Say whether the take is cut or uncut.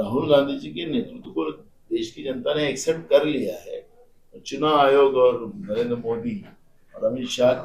uncut